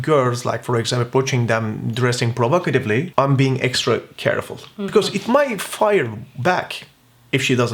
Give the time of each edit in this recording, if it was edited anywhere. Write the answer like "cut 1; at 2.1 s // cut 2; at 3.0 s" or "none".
cut 1; at 3.1 s